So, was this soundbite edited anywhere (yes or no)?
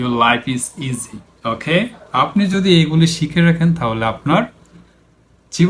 no